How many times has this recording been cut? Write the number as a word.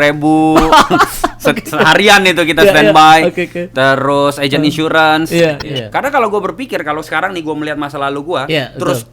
one